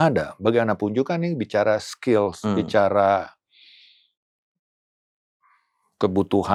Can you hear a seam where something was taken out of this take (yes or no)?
no